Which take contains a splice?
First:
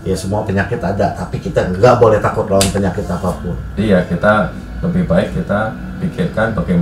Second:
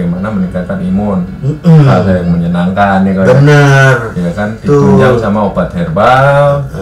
first; 1 cut; at 3.7 s

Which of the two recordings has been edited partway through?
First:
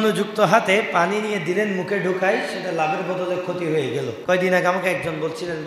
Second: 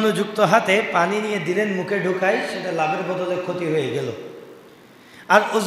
first; 1 cut; at 4.2 s

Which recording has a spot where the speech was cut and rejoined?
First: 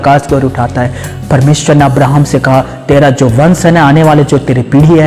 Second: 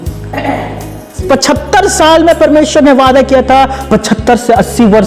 second; 1 cut; at 1.2 s

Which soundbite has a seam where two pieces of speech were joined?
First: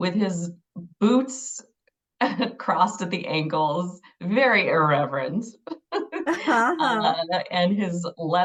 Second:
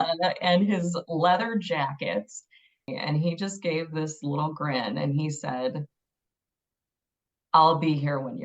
second; 1 cut; at 2.9 s

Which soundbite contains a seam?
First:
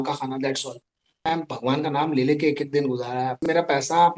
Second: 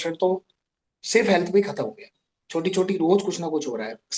first; 2 cuts; at 1.3 s, 3.4 s

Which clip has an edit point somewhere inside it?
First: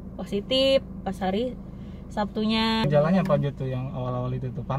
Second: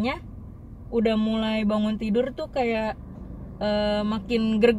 first; 1 cut; at 2.8 s

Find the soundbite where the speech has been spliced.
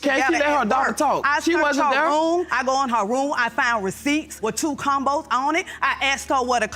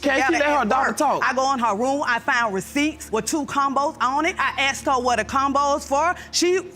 second; 2 cuts; at 1.2 s, 4.4 s

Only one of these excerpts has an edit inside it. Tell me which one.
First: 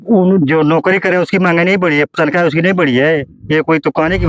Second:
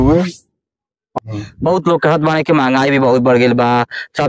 second; 1 cut; at 1.1 s

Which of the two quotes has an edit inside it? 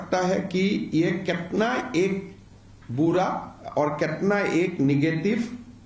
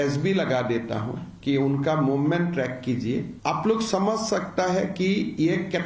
second; 1 cut; at 3.3 s

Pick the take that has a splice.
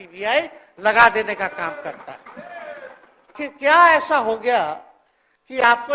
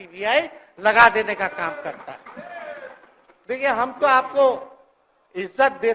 first; 1 cut; at 3.3 s

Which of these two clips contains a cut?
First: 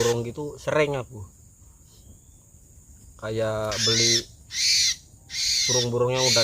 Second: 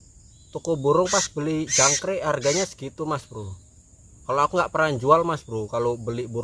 first; 1 cut; at 3.0 s

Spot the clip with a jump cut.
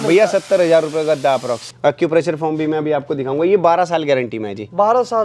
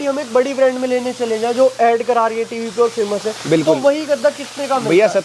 first; 1 cut; at 1.7 s

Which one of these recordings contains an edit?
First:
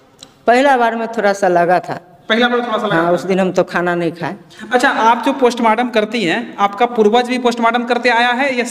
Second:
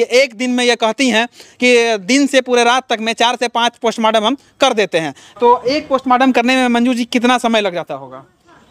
second; 1 cut; at 5.3 s

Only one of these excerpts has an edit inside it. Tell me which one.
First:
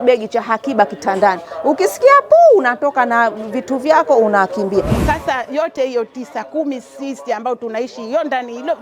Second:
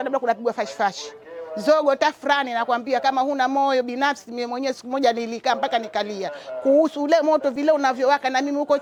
first; 1 cut; at 4.9 s

